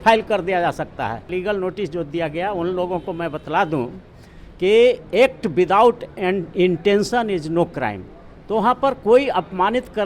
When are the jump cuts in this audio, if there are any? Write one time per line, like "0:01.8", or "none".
0:01.3